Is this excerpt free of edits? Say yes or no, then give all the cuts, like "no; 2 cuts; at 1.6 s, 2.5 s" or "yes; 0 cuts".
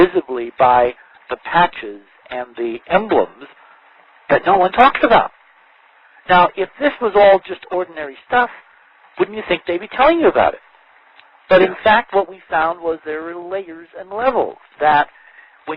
yes; 0 cuts